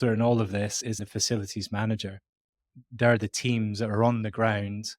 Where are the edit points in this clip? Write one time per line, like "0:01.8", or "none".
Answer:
0:01.0
0:02.7